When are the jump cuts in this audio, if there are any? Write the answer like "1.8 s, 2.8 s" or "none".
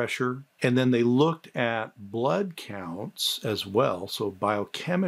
none